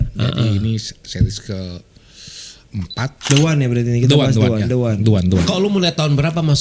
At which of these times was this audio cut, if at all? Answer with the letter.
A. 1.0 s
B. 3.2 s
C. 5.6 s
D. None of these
B